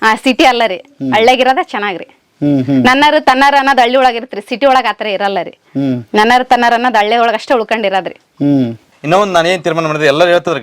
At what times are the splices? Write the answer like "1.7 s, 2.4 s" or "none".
8.9 s